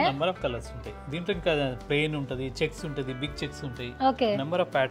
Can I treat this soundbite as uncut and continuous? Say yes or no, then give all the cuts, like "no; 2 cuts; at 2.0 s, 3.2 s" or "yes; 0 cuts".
yes; 0 cuts